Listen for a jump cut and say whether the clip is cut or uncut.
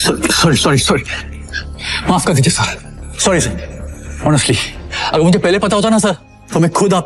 uncut